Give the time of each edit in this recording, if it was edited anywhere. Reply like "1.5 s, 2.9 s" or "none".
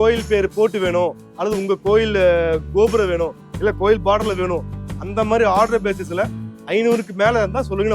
none